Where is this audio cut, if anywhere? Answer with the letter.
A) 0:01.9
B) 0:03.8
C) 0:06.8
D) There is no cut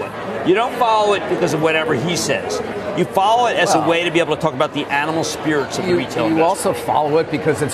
C